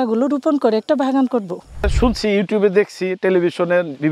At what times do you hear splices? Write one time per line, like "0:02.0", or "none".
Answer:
0:01.9